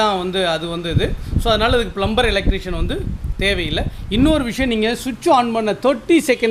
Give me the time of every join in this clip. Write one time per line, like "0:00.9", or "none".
none

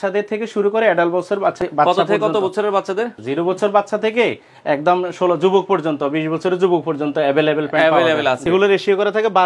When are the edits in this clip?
0:01.6
0:03.1
0:08.4

